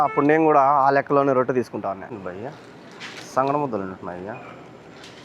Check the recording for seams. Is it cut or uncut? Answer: cut